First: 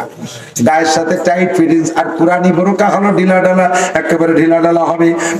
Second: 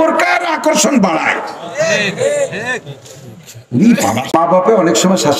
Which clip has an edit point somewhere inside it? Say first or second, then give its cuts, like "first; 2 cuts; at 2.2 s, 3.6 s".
second; 1 cut; at 4.2 s